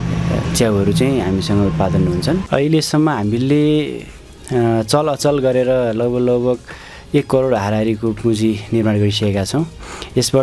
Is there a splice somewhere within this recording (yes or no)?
yes